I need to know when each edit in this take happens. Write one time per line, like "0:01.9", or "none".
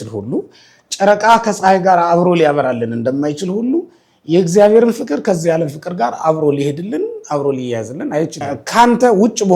0:08.4